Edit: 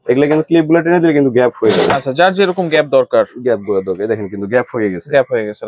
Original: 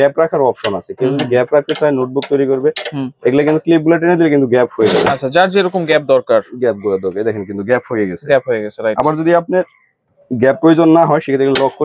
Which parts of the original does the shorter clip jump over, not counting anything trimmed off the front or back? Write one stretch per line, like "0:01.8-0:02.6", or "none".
none